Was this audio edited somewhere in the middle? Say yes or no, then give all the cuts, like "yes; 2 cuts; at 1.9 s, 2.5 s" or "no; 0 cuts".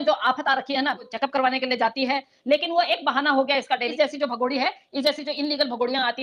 yes; 2 cuts; at 1.1 s, 3.9 s